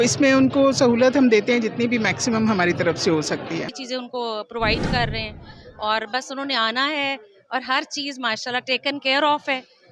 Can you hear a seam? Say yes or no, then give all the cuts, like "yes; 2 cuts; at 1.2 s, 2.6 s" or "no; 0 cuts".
yes; 1 cut; at 3.8 s